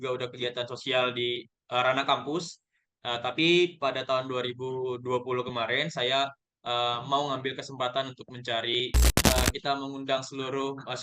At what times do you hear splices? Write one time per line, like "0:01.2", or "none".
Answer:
0:09.2

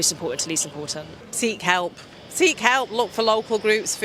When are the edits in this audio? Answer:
0:00.9

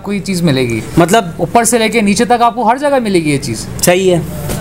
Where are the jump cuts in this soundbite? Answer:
none

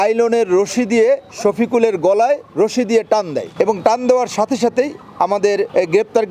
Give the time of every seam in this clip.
none

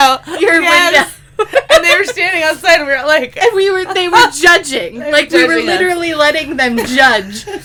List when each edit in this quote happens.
none

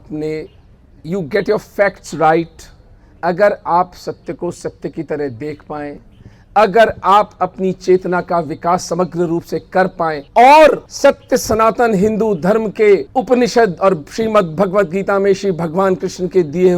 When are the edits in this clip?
0:10.2
0:10.9
0:13.1

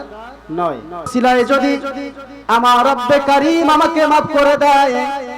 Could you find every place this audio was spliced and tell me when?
0:00.9

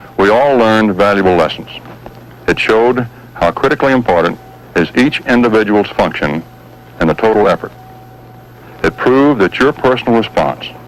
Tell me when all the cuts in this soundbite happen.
none

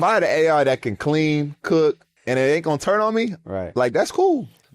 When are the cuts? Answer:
0:02.1

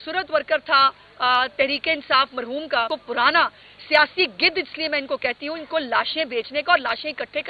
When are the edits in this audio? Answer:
0:02.9

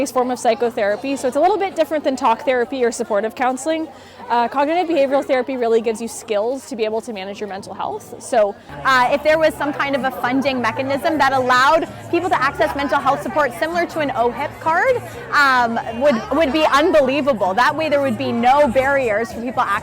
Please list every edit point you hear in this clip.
0:08.7

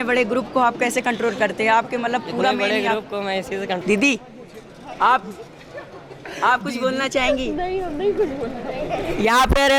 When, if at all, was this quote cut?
0:03.8

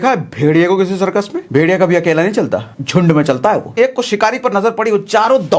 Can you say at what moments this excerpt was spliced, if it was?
0:01.4
0:02.8
0:03.7

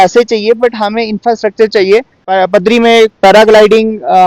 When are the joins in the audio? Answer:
0:02.2

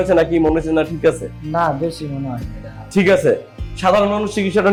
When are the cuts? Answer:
none

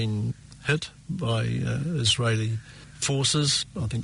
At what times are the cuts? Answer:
none

